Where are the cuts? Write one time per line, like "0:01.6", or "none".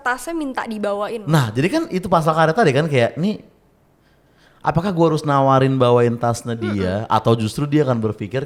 none